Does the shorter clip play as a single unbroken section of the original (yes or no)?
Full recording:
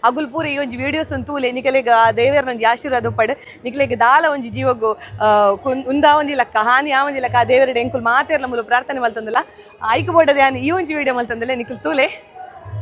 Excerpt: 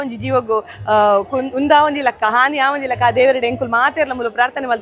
yes